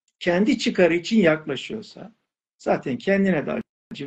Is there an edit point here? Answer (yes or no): yes